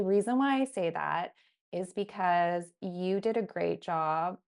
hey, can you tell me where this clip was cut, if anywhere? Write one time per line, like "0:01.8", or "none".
none